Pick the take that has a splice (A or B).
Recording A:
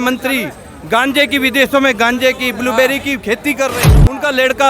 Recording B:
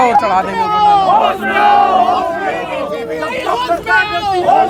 A